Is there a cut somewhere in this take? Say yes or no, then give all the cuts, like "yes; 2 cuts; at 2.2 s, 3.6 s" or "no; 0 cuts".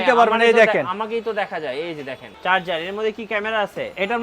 yes; 1 cut; at 2.2 s